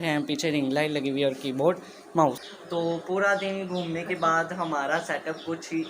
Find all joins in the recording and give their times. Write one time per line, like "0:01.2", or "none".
0:02.4